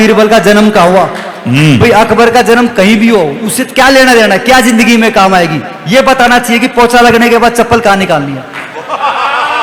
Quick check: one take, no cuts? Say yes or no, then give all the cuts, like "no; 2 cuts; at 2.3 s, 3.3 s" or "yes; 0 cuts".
yes; 0 cuts